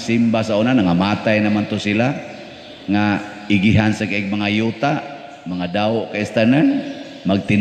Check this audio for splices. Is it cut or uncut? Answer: uncut